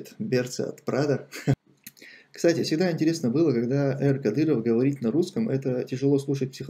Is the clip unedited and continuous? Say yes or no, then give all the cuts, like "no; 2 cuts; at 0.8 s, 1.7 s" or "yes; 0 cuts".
no; 1 cut; at 1.6 s